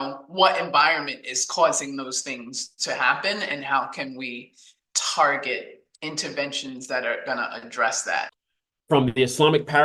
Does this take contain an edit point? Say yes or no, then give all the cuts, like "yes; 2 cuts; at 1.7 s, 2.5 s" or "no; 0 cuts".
yes; 1 cut; at 8.4 s